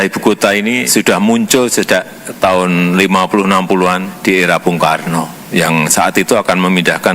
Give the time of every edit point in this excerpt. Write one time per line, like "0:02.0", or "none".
0:00.8
0:02.2
0:04.1
0:05.4